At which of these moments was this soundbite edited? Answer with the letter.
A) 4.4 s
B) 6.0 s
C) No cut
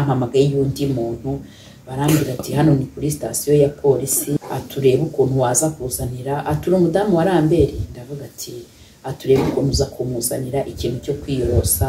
A